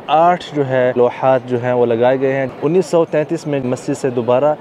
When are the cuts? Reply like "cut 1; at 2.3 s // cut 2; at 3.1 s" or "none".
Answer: cut 1; at 1.0 s // cut 2; at 2.5 s // cut 3; at 3.6 s